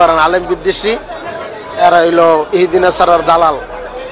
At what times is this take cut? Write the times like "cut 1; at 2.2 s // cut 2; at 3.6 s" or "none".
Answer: none